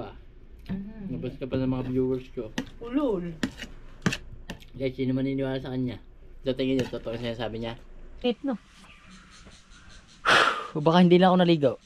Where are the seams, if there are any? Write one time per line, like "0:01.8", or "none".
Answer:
0:08.2